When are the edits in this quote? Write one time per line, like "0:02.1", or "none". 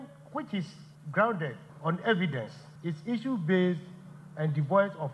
none